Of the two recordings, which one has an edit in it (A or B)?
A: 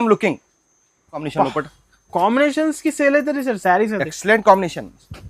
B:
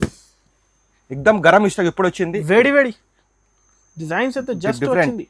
A